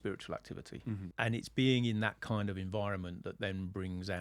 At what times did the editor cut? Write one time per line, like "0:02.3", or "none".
0:01.1